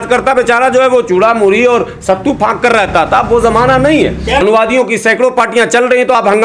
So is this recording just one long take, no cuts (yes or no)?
no